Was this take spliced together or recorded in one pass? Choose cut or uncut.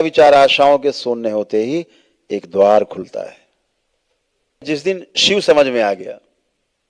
cut